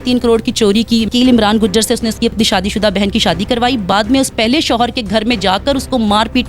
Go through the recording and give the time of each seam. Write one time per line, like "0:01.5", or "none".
0:01.1